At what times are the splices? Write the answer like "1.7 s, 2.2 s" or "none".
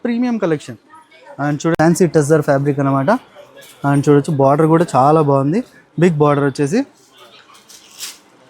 1.7 s